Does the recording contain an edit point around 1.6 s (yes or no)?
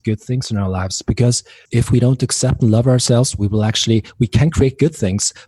yes